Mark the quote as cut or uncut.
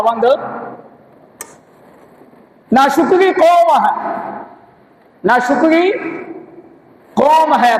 uncut